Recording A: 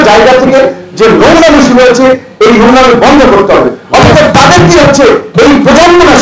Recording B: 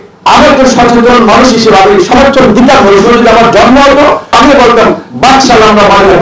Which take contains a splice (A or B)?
B